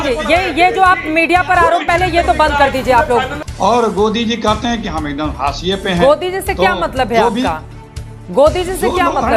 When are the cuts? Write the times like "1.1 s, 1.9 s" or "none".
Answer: 3.4 s